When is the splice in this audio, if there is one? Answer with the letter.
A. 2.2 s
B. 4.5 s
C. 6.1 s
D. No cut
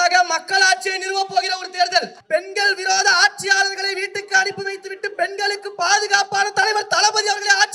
A